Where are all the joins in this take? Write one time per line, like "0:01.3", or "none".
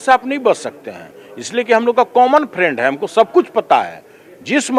none